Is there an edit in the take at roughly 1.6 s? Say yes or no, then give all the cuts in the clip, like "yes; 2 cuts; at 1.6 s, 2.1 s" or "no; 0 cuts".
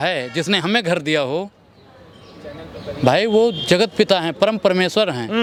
no; 0 cuts